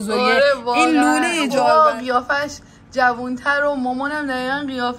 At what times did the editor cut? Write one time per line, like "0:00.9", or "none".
0:01.5